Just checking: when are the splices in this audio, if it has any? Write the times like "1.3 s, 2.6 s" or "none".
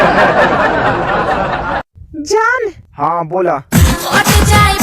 1.1 s, 2.0 s